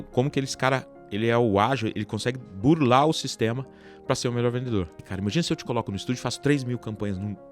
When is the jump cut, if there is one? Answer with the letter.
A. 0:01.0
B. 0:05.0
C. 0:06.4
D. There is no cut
B